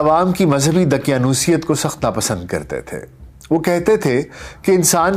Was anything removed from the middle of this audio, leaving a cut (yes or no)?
no